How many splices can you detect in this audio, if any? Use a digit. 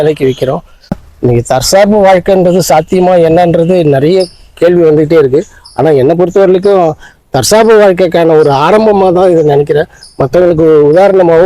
1